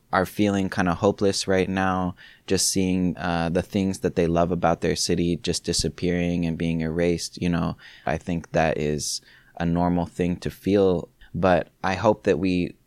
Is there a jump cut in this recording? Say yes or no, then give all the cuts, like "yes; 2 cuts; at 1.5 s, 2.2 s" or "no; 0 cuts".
yes; 3 cuts; at 3.2 s, 8.1 s, 11.1 s